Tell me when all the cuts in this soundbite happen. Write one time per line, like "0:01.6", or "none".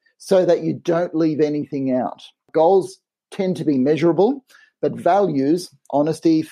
0:02.5